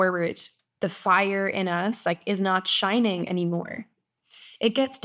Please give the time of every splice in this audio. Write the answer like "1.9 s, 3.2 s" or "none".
4.1 s